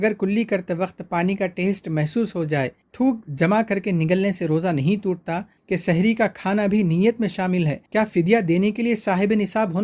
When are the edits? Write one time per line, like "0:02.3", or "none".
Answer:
0:02.8
0:05.5
0:07.8